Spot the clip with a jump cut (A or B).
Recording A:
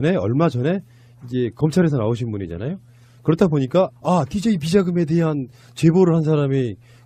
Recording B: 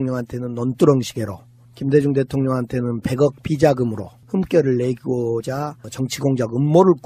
B